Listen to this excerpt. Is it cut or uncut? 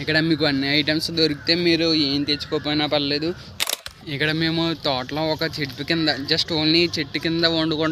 cut